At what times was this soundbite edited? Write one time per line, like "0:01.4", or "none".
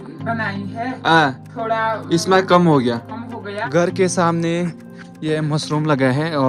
0:03.5